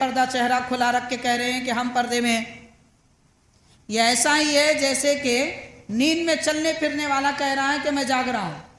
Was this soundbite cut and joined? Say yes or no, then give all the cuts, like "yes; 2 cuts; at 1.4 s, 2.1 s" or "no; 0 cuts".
no; 0 cuts